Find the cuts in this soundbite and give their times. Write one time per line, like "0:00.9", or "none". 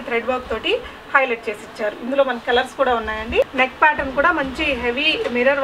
0:03.4